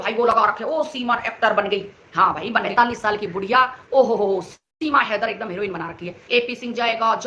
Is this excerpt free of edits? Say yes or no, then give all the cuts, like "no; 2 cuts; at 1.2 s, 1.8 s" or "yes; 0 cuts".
no; 2 cuts; at 2.7 s, 6.2 s